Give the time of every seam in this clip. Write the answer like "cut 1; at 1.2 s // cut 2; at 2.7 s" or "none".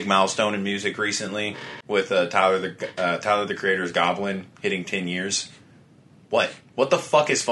cut 1; at 1.7 s